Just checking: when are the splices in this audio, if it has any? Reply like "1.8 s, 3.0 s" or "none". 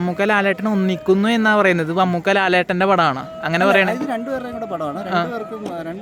none